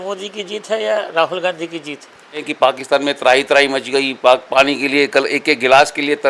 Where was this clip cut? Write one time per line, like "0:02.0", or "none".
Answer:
0:02.5